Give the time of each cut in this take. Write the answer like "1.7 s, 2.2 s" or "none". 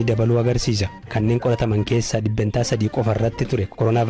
1.1 s